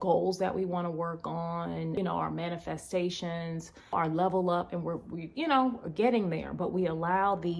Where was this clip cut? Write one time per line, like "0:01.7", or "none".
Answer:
0:02.0
0:03.9